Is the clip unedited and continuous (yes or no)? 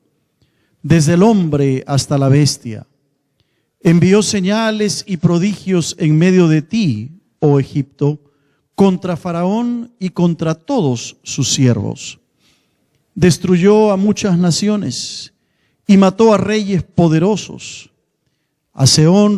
no